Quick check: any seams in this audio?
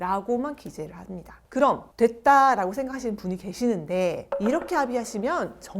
no; 0 cuts

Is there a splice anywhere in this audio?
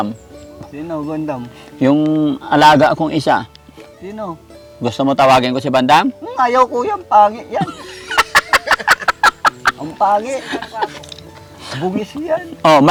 no; 0 cuts

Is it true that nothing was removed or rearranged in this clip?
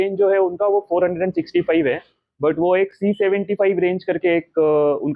yes; 0 cuts

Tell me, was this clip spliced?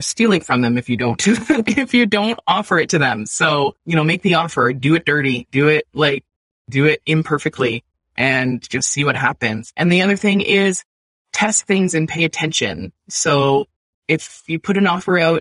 yes; 1 cut; at 4.8 s

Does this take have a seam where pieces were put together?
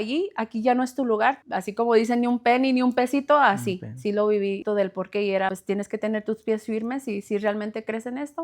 yes; 3 cuts; at 1.4 s, 4.6 s, 5.6 s

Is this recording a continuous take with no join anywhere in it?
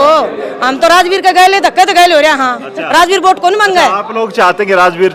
yes; 0 cuts

